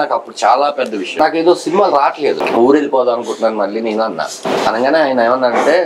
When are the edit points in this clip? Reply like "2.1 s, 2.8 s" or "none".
1.1 s, 2.4 s, 4.4 s